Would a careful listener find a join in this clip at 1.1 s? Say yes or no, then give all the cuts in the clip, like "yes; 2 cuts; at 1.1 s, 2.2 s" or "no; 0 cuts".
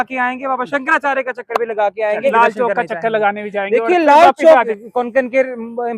no; 2 cuts; at 2.3 s, 4.8 s